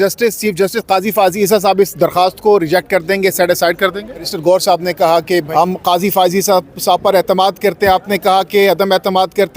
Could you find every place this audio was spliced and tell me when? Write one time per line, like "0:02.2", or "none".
0:04.3
0:05.5